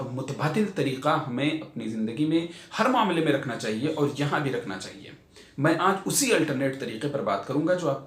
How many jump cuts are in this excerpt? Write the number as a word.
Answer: zero